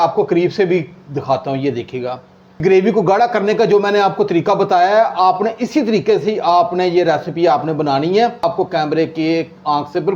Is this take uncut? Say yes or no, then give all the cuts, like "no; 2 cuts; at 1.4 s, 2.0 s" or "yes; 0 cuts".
no; 2 cuts; at 2.6 s, 8.4 s